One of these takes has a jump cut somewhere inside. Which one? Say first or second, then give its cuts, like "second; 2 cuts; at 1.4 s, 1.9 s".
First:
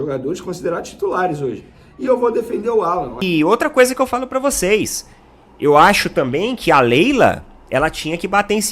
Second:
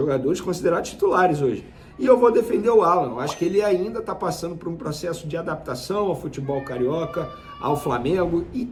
first; 1 cut; at 3.1 s